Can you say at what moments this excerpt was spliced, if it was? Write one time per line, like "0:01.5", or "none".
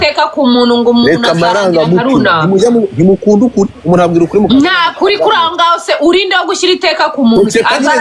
none

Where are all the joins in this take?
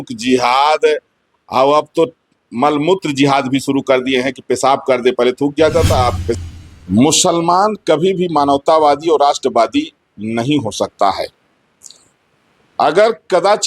0:06.4

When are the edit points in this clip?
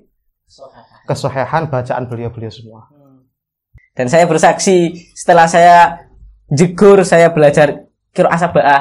0:03.6

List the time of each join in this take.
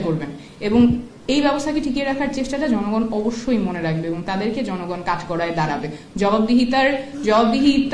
none

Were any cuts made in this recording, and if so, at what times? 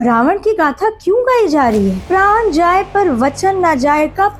0:02.0

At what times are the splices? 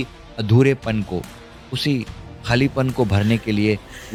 none

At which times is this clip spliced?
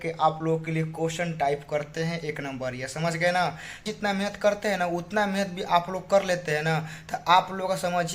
0:03.9

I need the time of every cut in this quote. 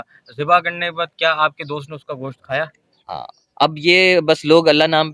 none

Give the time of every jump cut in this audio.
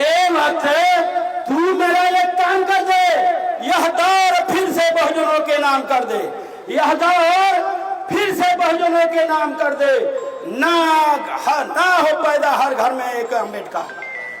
none

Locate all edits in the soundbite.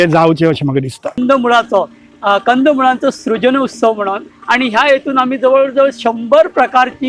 0:01.2

